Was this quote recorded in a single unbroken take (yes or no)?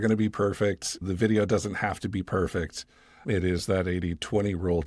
no